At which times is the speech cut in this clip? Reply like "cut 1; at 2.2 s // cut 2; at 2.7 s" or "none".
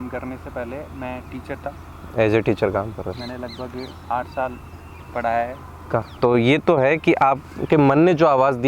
cut 1; at 6.1 s